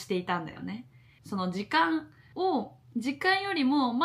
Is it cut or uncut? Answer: cut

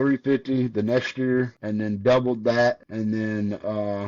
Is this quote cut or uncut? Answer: cut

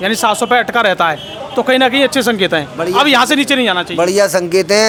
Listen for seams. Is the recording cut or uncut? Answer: uncut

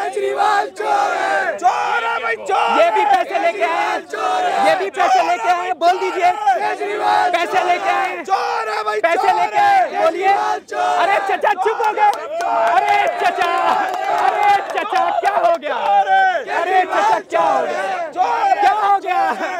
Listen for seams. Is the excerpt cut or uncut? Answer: uncut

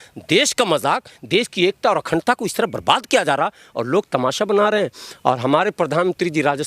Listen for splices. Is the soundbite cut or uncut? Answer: uncut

